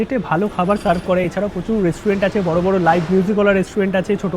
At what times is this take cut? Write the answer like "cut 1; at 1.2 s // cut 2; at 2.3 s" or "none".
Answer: none